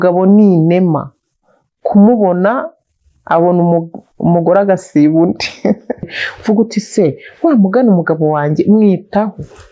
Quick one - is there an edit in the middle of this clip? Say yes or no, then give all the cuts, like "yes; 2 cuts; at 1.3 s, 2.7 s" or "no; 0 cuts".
yes; 1 cut; at 6.2 s